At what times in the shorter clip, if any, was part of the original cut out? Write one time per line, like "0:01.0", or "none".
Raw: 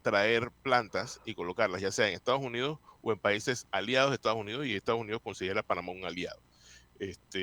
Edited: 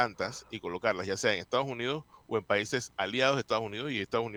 none